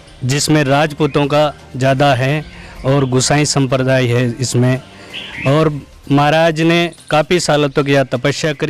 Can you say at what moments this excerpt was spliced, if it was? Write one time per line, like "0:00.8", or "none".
none